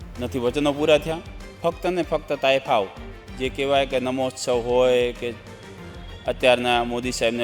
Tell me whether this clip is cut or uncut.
uncut